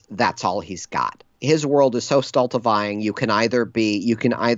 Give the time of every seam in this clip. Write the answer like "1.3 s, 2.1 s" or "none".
1.3 s